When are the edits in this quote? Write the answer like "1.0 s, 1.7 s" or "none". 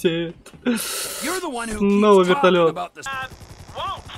2.9 s